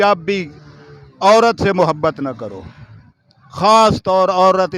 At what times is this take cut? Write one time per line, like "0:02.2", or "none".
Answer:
none